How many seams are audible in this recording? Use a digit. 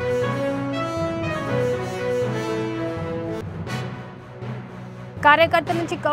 0